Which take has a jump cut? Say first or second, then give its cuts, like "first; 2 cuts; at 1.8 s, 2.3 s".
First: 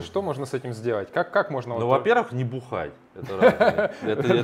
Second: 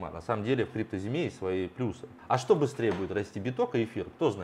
second; 1 cut; at 2.1 s